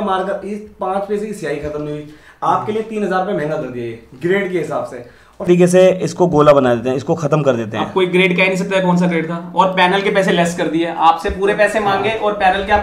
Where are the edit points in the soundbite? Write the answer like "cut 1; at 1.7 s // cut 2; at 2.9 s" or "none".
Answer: cut 1; at 5.5 s